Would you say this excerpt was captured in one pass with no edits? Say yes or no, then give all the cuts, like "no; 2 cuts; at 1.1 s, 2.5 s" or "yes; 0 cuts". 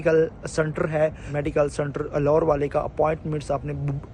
no; 1 cut; at 1.3 s